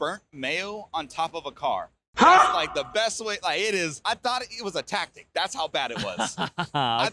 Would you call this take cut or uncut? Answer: uncut